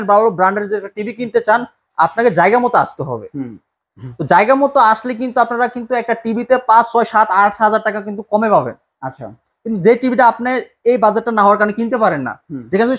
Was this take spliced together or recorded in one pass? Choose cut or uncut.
uncut